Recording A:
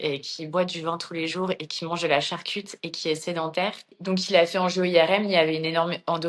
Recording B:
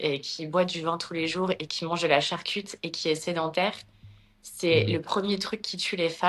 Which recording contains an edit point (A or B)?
A